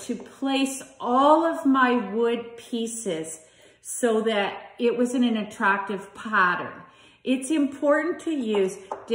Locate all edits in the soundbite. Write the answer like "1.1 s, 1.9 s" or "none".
1.8 s